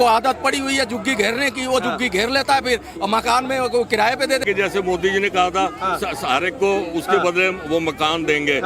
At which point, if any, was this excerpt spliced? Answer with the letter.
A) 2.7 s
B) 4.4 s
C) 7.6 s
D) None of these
B